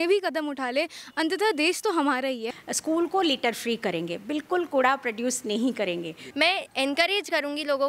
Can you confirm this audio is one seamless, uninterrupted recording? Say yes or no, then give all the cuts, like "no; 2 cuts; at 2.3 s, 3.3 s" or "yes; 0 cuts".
no; 2 cuts; at 2.5 s, 6.2 s